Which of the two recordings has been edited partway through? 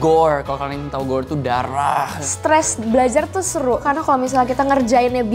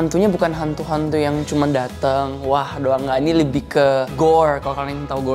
first; 2 cuts; at 2.2 s, 3.8 s

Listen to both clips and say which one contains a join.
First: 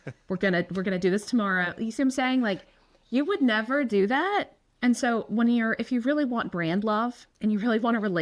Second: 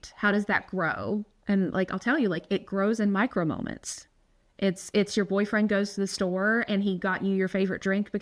first; 2 cuts; at 4.6 s, 7.2 s

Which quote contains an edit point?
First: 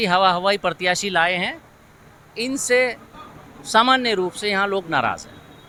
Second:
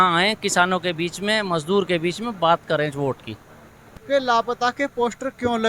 second; 1 cut; at 4.0 s

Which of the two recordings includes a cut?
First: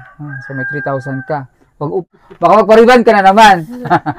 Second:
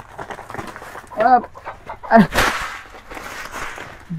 first; 1 cut; at 2.1 s

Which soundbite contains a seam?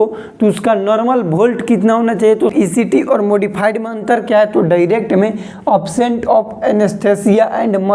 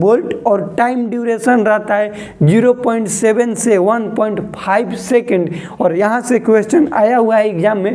first; 1 cut; at 2.5 s

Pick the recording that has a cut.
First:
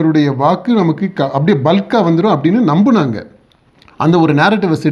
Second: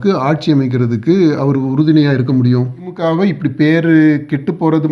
second; 1 cut; at 2.9 s

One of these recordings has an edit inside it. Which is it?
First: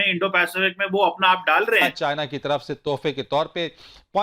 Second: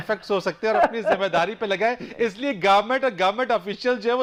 first; 1 cut; at 1.9 s

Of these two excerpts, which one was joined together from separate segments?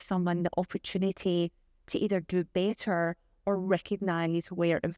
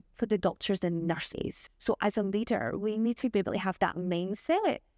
second; 1 cut; at 1.6 s

